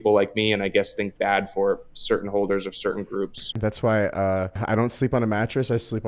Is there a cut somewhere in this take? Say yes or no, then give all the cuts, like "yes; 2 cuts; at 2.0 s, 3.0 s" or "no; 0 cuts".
yes; 2 cuts; at 3.6 s, 4.6 s